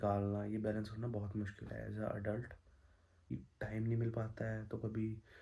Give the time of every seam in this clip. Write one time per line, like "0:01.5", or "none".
0:03.3